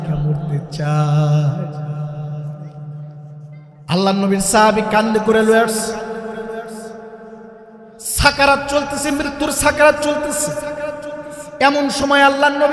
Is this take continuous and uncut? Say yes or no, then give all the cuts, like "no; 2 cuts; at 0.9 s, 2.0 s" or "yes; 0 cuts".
yes; 0 cuts